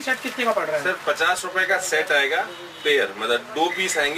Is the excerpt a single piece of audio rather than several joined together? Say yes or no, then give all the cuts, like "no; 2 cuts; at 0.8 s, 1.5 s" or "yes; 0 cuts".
yes; 0 cuts